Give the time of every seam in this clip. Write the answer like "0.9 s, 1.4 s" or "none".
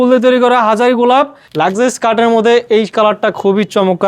1.4 s